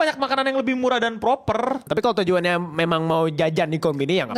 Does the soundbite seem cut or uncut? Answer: cut